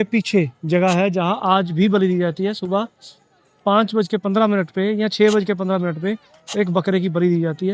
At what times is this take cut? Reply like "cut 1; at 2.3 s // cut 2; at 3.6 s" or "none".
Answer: none